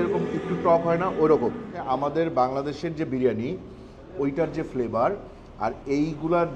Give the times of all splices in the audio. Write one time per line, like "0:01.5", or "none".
0:01.8